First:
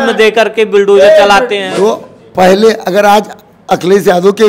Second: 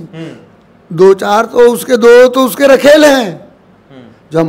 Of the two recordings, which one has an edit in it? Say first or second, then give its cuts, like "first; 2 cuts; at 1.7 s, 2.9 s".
first; 1 cut; at 1.6 s